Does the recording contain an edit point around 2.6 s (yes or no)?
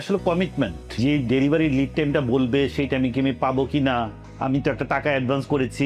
no